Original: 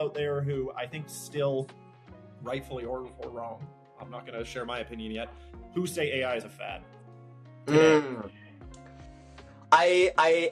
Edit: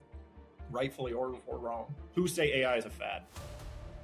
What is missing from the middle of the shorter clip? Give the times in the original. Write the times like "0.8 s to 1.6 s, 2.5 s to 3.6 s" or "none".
3.7 s to 5.6 s